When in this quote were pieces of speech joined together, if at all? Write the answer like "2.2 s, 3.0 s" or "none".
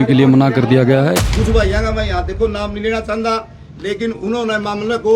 1.1 s